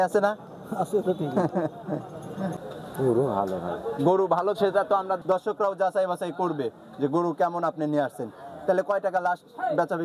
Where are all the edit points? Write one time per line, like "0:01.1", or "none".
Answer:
0:02.5
0:05.2

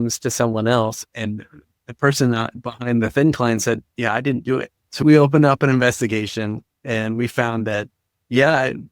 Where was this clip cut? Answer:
0:04.8

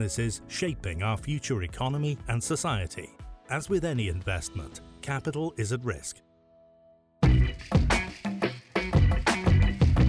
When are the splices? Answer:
0:07.0

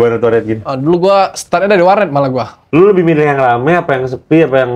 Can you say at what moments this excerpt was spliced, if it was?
0:02.5

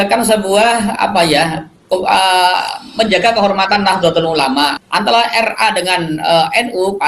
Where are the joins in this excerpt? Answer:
0:04.8

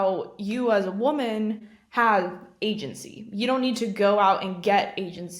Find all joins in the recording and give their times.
0:01.6

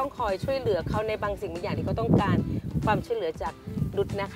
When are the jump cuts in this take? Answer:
none

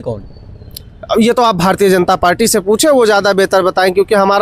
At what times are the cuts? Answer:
none

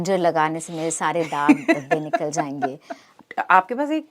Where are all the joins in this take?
0:03.2

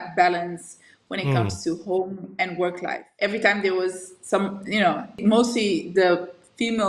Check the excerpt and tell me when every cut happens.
0:03.0
0:05.2

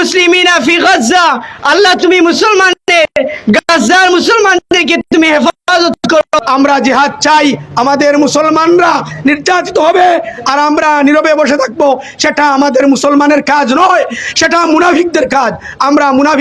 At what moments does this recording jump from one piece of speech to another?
0:06.4

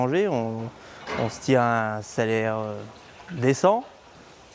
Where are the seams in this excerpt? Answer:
none

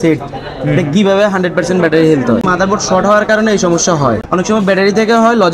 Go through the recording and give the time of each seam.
0:02.4
0:04.2

